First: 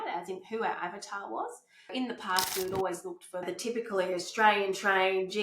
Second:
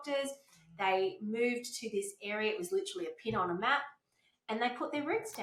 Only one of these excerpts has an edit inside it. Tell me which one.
first; 2 cuts; at 1.9 s, 3.4 s

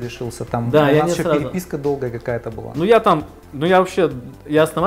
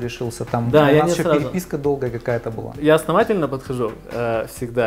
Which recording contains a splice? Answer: second; 1 cut; at 2.6 s

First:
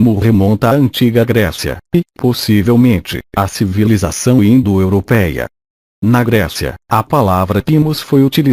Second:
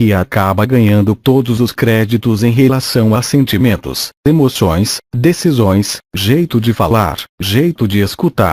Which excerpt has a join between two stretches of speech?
second; 1 cut; at 7.0 s

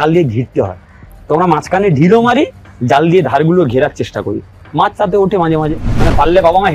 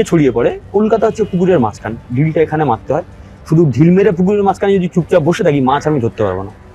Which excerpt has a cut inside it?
first; 1 cut; at 5.8 s

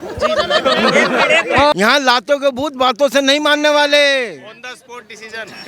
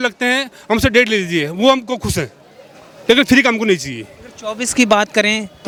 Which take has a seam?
first; 1 cut; at 1.7 s

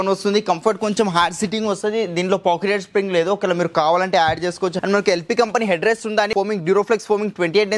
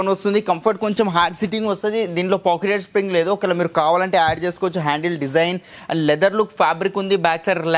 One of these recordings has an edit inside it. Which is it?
first; 2 cuts; at 4.8 s, 6.3 s

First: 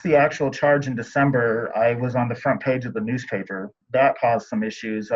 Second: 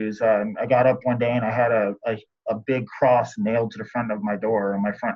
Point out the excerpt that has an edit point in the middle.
first; 1 cut; at 3.7 s

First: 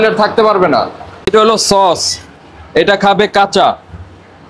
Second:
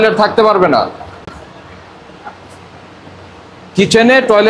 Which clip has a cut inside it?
first; 1 cut; at 1.3 s

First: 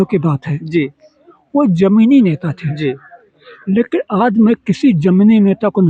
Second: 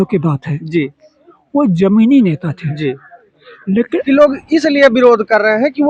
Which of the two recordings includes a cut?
second; 1 cut; at 4.0 s

